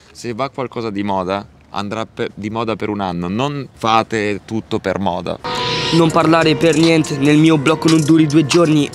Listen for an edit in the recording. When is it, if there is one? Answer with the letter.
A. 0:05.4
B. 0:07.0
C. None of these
A